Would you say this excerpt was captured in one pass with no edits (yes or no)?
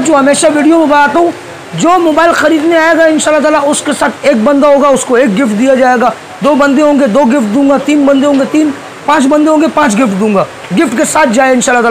yes